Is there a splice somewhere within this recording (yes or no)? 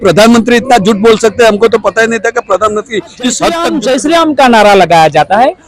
yes